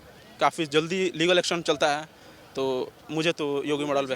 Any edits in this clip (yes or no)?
no